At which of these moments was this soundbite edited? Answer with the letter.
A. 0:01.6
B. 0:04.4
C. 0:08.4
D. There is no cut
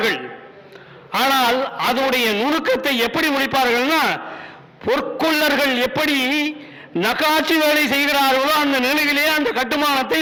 D